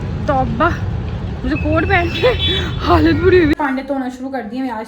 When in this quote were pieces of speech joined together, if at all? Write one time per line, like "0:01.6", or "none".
0:03.6